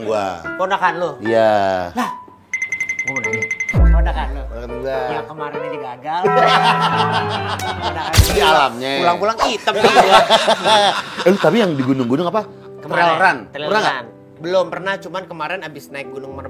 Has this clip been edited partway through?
yes; 1 cut; at 8.3 s

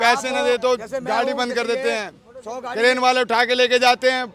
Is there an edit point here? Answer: no; 0 cuts

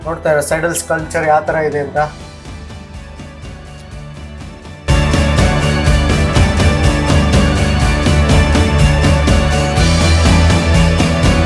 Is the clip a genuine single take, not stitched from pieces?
yes; 0 cuts

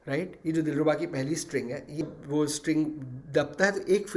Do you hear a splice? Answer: yes; 1 cut; at 2.1 s

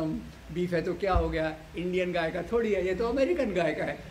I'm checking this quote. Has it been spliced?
no; 0 cuts

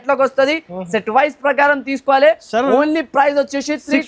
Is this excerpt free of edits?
yes; 0 cuts

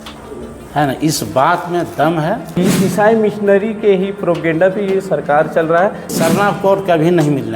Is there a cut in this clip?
yes; 2 cuts; at 2.5 s, 6.1 s

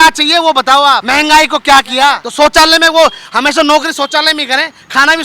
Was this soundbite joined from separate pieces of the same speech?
yes; 2 cuts; at 1.0 s, 2.2 s

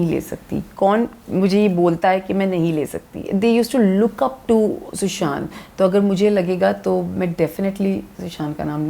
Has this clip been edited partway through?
yes; 1 cut; at 3.2 s

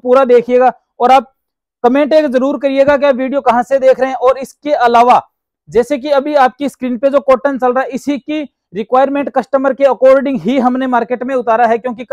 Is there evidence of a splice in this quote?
no; 0 cuts

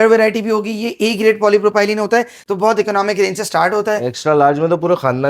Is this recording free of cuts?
no; 1 cut; at 2.4 s

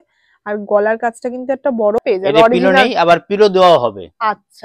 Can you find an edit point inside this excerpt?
yes; 1 cut; at 2.0 s

